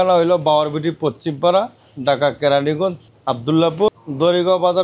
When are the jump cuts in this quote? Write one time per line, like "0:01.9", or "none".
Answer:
0:03.1
0:03.9